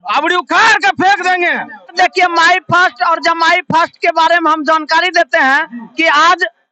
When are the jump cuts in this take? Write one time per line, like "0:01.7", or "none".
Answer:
0:01.9